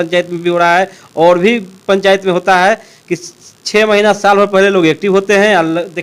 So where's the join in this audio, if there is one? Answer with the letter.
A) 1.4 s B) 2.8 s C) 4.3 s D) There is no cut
D